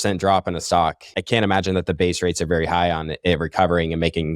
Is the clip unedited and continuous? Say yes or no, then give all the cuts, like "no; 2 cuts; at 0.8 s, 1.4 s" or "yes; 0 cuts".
no; 1 cut; at 1.1 s